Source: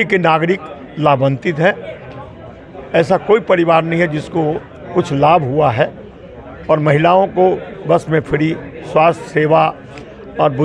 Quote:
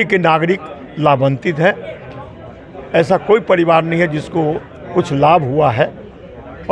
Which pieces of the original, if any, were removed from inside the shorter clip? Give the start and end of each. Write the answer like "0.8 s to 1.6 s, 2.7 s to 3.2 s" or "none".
none